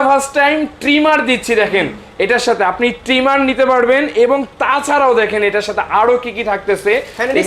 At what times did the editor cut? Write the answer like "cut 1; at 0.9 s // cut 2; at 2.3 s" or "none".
none